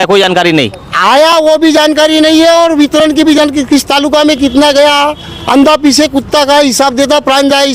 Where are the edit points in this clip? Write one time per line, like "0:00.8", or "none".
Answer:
none